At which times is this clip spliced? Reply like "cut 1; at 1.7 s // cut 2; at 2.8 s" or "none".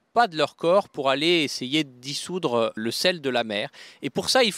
none